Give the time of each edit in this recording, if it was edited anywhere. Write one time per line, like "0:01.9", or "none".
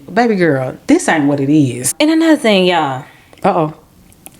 0:01.9